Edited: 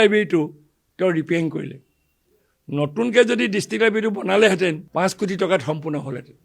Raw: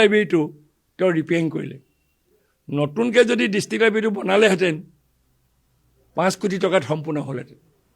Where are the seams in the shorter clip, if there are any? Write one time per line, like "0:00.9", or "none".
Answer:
0:04.8